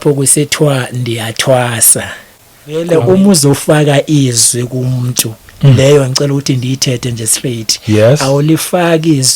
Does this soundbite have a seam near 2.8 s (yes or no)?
yes